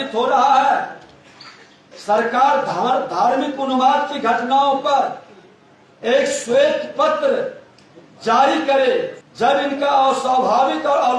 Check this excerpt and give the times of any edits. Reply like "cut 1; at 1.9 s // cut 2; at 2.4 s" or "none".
cut 1; at 9.2 s